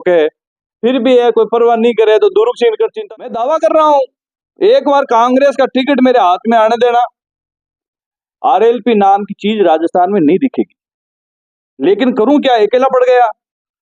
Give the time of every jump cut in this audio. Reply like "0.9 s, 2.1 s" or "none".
3.1 s